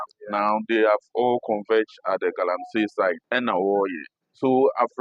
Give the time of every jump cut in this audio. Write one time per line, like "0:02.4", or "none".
0:03.2